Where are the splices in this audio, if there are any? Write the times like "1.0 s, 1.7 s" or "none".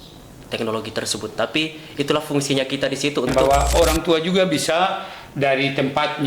3.7 s